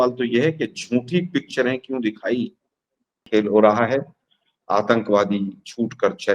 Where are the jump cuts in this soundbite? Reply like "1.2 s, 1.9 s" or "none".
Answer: 3.2 s